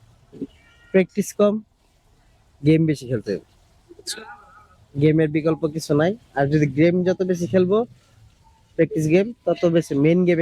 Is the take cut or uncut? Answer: uncut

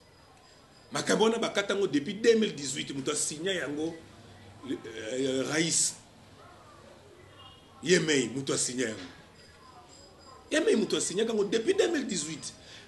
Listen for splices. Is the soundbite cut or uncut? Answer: uncut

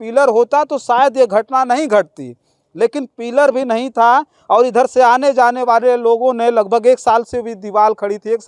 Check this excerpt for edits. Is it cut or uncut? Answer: uncut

